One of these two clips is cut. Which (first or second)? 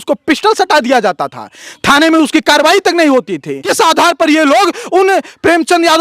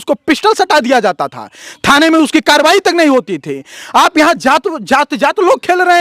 first